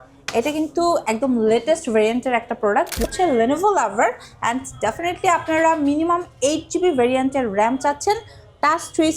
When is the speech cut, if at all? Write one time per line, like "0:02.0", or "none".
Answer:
0:03.0